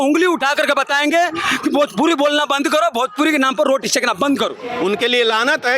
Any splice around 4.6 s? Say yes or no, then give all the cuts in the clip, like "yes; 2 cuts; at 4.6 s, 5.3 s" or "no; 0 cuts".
yes; 1 cut; at 4.6 s